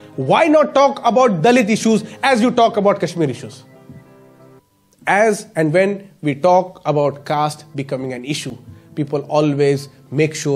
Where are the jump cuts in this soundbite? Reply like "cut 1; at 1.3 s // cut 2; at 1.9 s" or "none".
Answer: cut 1; at 4.6 s